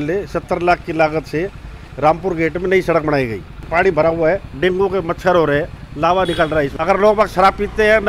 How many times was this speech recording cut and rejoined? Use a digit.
2